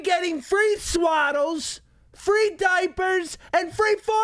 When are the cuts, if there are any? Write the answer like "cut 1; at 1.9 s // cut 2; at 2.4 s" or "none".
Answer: none